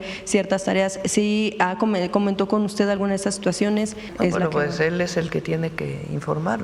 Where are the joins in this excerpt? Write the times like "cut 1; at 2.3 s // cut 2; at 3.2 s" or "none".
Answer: cut 1; at 4.0 s